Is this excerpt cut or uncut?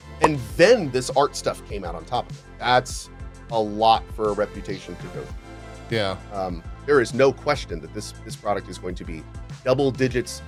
uncut